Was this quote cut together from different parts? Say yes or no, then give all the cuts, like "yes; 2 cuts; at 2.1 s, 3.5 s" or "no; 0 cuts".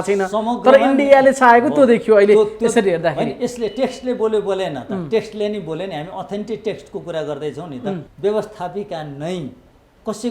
yes; 1 cut; at 8.1 s